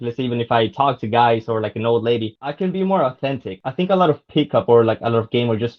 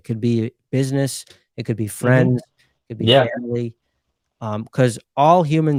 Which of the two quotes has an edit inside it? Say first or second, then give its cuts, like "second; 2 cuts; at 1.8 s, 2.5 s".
first; 2 cuts; at 2.4 s, 3.6 s